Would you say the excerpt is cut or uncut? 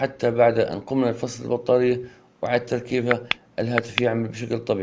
uncut